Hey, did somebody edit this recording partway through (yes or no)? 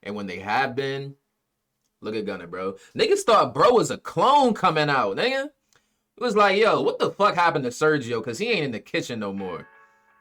no